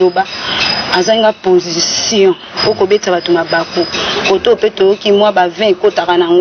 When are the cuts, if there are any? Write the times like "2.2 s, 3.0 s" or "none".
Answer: none